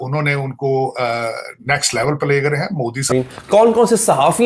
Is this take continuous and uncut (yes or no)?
no